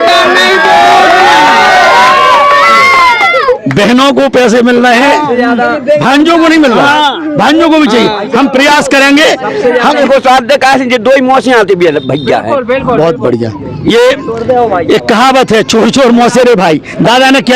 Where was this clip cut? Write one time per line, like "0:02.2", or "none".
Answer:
0:10.0